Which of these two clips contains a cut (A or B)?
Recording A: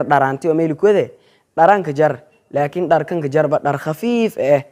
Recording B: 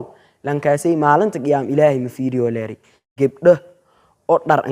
B